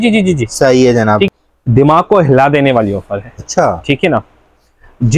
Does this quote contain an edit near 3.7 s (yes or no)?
no